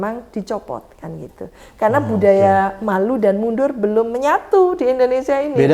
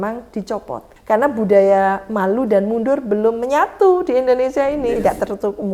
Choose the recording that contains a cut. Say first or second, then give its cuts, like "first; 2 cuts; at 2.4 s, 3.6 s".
second; 2 cuts; at 0.9 s, 4.8 s